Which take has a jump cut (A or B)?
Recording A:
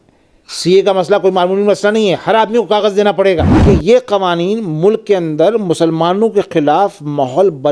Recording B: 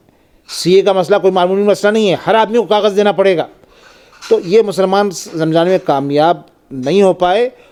A